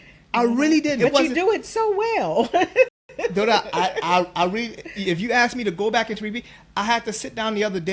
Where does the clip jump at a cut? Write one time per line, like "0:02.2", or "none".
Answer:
none

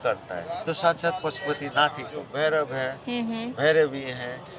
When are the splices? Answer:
0:02.3

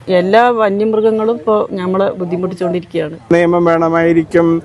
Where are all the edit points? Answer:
0:03.3

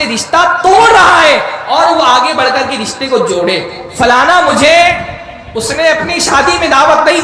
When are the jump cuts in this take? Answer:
0:03.8

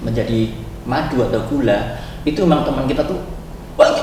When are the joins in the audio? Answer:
none

